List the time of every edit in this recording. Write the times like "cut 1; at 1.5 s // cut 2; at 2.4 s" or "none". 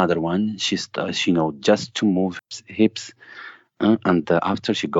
cut 1; at 2.4 s